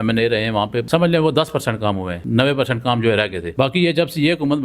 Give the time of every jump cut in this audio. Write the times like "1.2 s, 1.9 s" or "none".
0.8 s, 2.1 s, 3.4 s